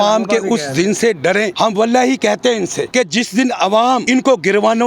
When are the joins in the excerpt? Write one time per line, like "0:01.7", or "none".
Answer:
0:01.5
0:02.8
0:04.0